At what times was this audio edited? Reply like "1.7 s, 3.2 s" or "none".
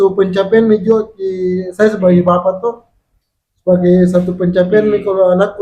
none

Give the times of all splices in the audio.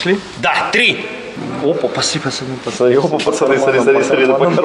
1.4 s

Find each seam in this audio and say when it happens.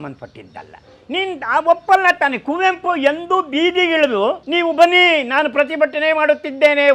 4.4 s

